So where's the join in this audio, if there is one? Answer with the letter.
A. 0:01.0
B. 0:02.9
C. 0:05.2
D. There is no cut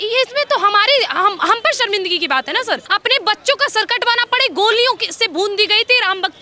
B